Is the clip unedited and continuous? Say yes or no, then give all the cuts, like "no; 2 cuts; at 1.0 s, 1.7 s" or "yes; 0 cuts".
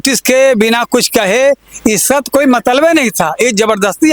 yes; 0 cuts